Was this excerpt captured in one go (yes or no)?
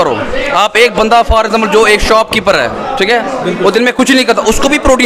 yes